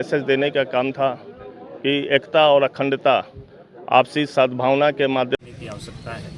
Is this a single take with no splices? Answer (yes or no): no